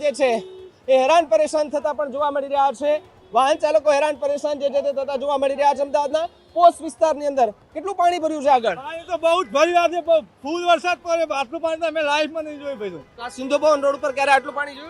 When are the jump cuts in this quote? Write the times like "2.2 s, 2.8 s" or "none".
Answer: none